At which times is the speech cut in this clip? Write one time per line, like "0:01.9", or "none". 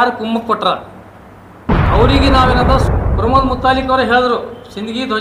0:02.9